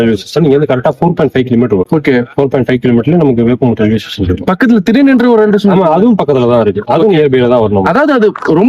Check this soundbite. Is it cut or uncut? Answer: uncut